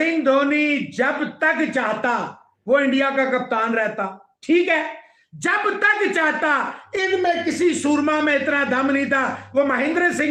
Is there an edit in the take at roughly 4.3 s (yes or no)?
no